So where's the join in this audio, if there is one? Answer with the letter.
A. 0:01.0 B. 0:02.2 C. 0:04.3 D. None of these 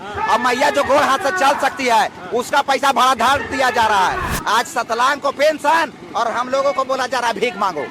C